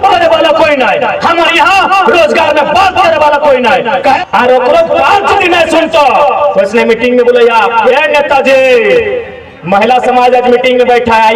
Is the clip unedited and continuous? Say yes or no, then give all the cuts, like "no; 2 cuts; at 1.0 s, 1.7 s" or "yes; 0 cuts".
no; 1 cut; at 4.2 s